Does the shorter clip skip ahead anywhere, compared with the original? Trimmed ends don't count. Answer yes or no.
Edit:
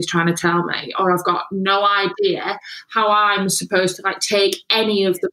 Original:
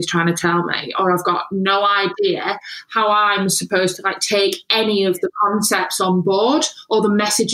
no